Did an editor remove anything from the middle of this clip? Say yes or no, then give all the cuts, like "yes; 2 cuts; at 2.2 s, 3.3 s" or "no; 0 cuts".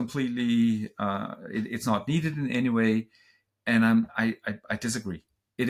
no; 0 cuts